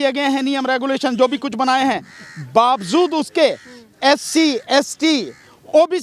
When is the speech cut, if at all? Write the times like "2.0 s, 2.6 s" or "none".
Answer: none